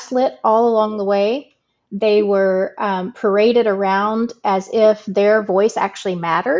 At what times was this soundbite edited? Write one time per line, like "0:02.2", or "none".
none